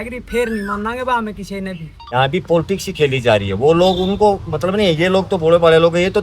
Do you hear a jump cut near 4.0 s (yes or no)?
no